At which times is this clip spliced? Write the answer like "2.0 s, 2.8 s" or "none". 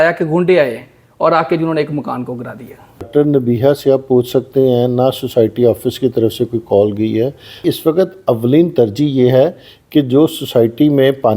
3.1 s, 7.6 s